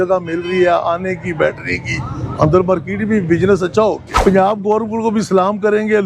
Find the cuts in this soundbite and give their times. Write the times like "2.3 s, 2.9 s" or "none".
4.1 s